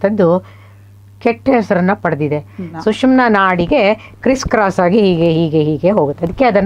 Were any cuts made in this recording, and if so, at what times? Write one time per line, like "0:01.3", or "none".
0:02.8